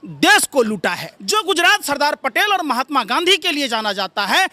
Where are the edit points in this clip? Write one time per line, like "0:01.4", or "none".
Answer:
0:01.1